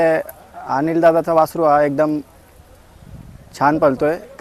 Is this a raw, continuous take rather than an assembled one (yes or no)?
yes